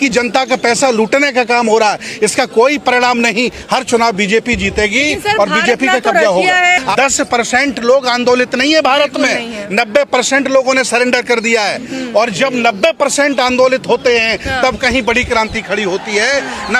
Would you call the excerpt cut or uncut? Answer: cut